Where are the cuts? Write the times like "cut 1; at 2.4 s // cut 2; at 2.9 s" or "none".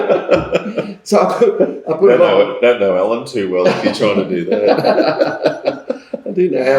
none

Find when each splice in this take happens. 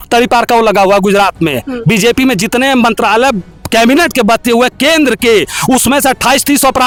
none

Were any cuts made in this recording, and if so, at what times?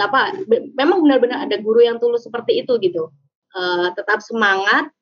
cut 1; at 3.4 s

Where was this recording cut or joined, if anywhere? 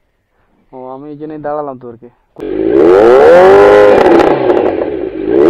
cut 1; at 2.5 s

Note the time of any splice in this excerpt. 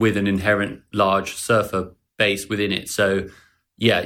cut 1; at 2.0 s

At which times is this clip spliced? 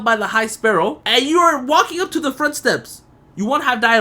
cut 1; at 1.0 s

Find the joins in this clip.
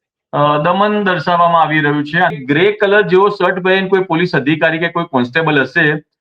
cut 1; at 2.4 s

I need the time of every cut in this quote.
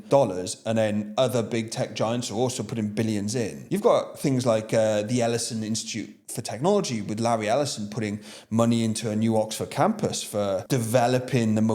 cut 1; at 3.6 s // cut 2; at 10.6 s

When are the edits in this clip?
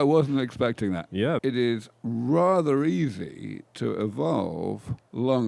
cut 1; at 1.4 s

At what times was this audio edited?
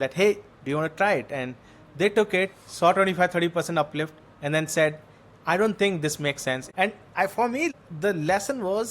cut 1; at 6.7 s // cut 2; at 7.7 s

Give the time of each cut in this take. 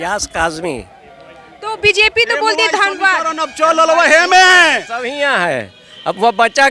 none

